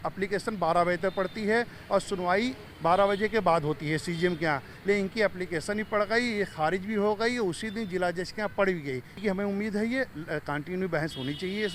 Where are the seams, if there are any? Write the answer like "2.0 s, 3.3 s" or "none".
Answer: 9.2 s